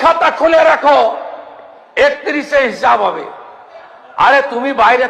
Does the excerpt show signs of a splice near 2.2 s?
no; 0 cuts

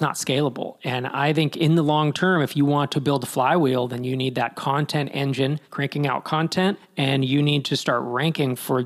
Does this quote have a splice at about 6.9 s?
yes; 2 cuts; at 5.7 s, 6.9 s

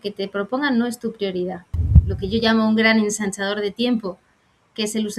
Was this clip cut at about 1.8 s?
yes; 1 cut; at 1.8 s

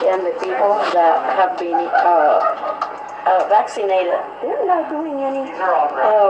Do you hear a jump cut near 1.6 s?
no; 0 cuts

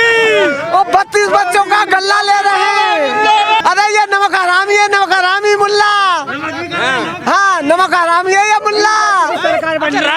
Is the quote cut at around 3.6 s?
yes; 1 cut; at 3.6 s

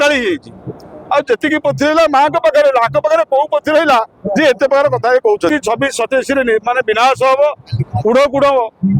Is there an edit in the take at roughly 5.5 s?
yes; 1 cut; at 5.5 s

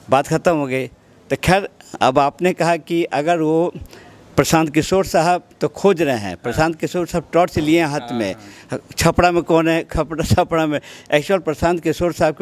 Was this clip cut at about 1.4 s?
no; 0 cuts

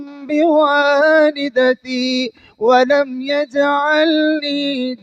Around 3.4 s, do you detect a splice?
no; 0 cuts

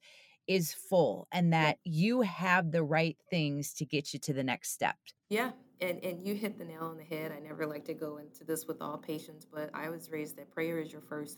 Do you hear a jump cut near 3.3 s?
no; 2 cuts; at 1.8 s, 5.1 s

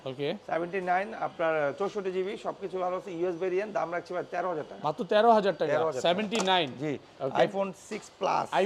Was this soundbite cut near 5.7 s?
no; 0 cuts

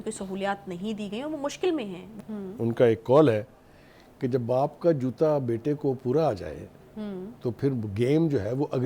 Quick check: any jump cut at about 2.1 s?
yes; 1 cut; at 2.1 s

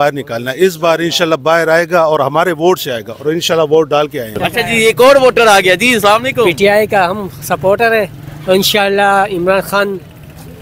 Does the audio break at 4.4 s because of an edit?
yes; 1 cut; at 4.4 s

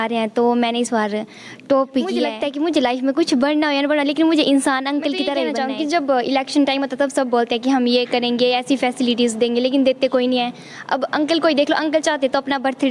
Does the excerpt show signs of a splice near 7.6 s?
no; 2 cuts; at 2.4 s, 5.5 s

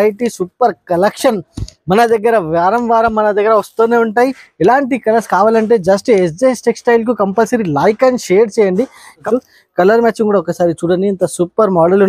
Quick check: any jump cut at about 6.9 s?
no; 2 cuts; at 4.4 s, 9.3 s

